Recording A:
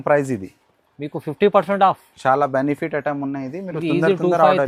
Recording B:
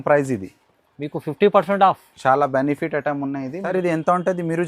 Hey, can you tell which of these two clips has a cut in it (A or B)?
B